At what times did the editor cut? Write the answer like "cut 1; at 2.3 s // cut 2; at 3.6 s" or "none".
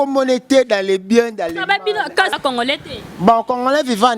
cut 1; at 2.3 s